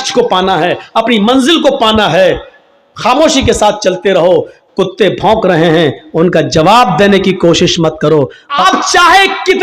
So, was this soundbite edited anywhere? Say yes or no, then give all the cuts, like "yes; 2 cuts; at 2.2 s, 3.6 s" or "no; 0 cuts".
yes; 1 cut; at 8.6 s